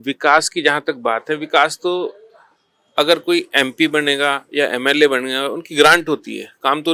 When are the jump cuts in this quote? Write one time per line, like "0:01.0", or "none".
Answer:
none

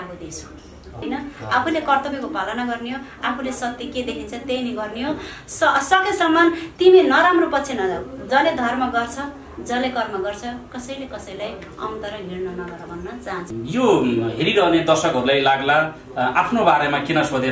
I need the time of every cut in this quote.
0:01.0
0:13.5

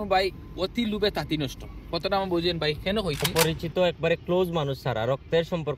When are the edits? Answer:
0:03.3

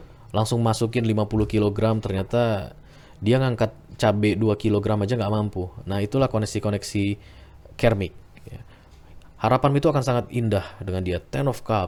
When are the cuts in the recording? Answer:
none

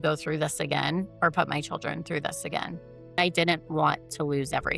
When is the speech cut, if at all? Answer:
0:03.2

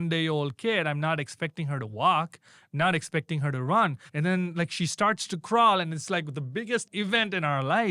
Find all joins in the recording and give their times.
0:04.0
0:06.9

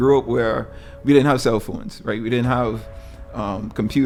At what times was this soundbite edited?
none

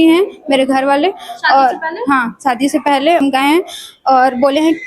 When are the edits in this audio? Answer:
0:03.2

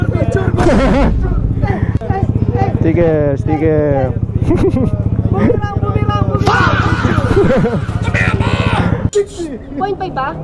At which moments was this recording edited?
0:02.0

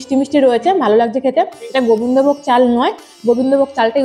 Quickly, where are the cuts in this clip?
none

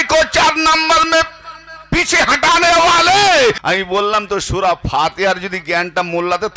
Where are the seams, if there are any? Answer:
0:03.6

